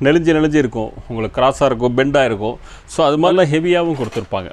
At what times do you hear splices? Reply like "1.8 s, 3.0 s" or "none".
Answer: 3.3 s